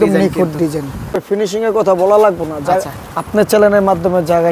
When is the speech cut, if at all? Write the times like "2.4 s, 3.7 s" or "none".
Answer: 1.2 s